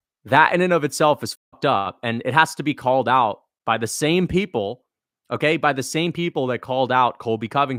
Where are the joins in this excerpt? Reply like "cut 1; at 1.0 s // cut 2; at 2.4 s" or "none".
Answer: none